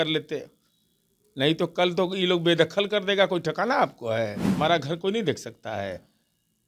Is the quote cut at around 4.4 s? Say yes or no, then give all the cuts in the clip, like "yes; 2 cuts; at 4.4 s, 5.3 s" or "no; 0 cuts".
yes; 1 cut; at 4.4 s